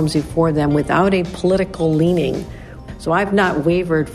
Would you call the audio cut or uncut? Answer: cut